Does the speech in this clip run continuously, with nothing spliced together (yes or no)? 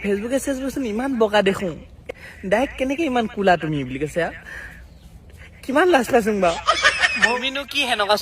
no